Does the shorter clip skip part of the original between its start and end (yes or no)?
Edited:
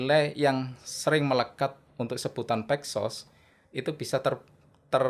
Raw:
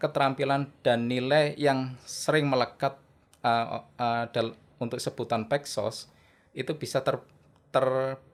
yes